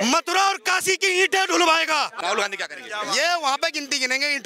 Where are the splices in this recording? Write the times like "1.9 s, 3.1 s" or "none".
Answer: 2.1 s